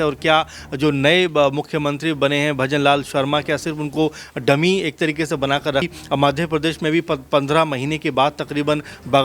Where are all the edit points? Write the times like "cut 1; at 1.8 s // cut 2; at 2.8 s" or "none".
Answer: cut 1; at 5.9 s